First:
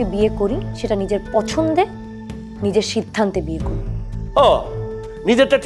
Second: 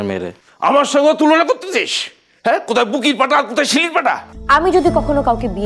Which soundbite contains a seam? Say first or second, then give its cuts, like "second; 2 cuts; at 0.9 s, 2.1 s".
second; 1 cut; at 4.3 s